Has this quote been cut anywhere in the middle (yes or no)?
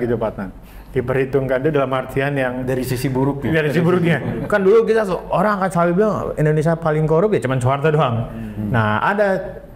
no